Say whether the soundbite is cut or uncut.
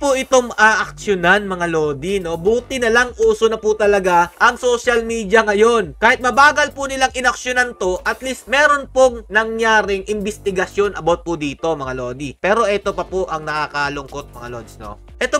uncut